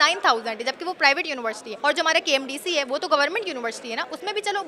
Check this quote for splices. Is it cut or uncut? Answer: uncut